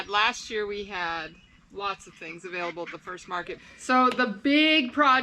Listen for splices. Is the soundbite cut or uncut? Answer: cut